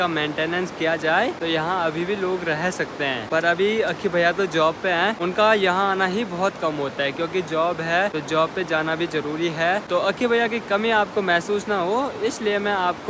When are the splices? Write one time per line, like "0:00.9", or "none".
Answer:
none